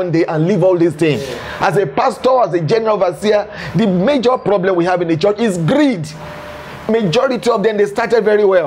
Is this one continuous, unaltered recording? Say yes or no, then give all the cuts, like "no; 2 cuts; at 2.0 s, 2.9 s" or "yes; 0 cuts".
yes; 0 cuts